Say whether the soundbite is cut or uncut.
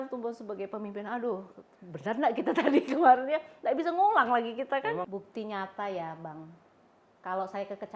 cut